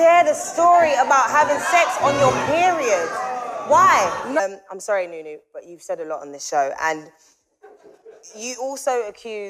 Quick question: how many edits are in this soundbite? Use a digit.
1